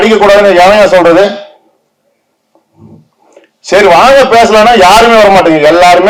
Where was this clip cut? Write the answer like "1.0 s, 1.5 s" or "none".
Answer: none